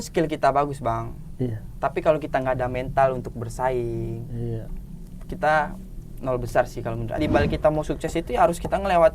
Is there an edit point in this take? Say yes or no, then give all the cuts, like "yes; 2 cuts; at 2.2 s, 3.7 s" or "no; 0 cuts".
yes; 1 cut; at 7.2 s